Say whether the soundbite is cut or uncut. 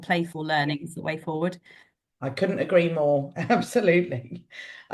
uncut